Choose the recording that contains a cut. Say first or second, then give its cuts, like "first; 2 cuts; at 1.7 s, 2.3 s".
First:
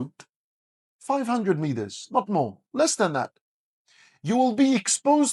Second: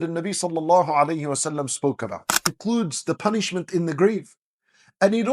second; 1 cut; at 2.6 s